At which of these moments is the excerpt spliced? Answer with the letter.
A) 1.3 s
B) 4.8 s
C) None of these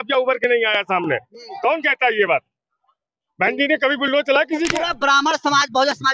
B